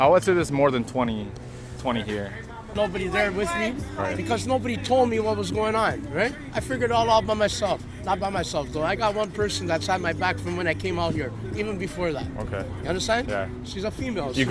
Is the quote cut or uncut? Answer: cut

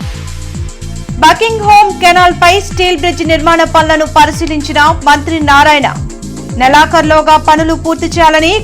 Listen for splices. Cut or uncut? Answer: cut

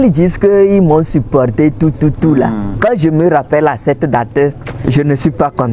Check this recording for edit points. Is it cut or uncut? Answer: cut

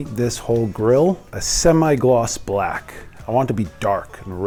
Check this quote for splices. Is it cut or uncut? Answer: uncut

